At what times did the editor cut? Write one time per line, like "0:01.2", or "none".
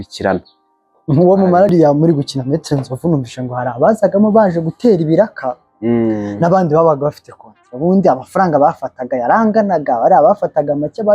0:01.7